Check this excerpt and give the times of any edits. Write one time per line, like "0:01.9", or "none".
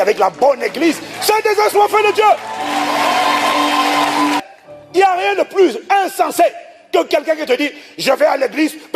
0:04.5